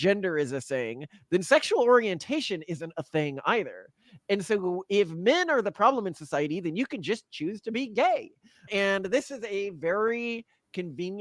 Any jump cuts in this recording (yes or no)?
no